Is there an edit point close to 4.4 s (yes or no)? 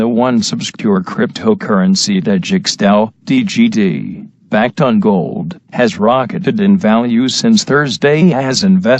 yes